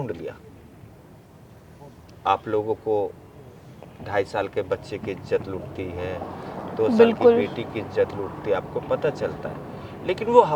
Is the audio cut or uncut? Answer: uncut